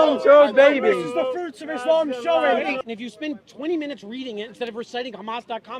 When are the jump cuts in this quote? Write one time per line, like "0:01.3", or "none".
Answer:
0:02.8

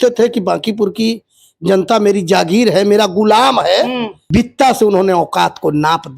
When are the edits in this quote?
0:04.1

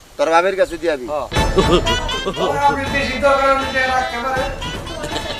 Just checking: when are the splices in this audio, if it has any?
0:01.3

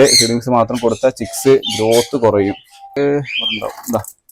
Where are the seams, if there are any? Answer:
0:02.9

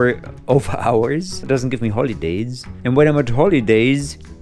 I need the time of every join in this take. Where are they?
0:01.5

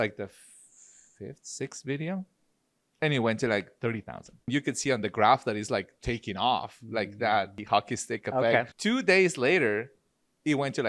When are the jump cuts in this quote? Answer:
0:04.5
0:07.6
0:08.7

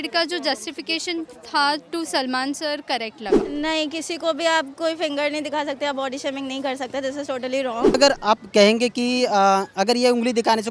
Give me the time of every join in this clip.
0:03.4
0:08.0

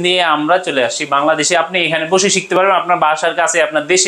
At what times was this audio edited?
none

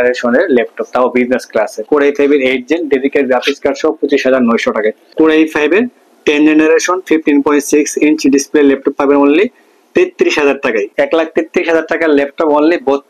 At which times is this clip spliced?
0:01.8
0:05.0
0:10.9

